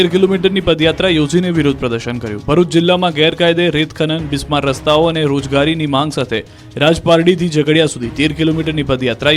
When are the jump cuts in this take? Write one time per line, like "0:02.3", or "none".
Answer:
0:05.6